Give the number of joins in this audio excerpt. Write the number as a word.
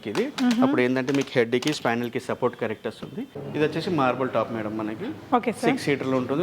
one